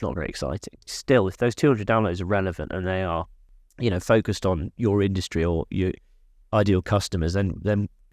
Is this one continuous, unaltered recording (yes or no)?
no